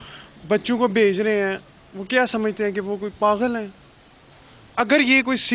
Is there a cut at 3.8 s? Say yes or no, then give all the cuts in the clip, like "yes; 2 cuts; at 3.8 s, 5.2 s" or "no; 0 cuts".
no; 0 cuts